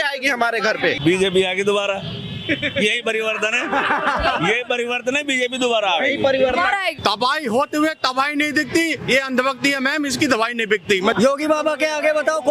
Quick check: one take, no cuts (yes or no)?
no